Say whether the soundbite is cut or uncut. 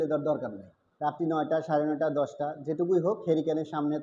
cut